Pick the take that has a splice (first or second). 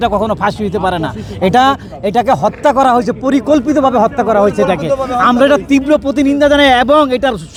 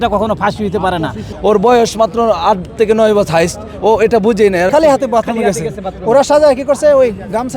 second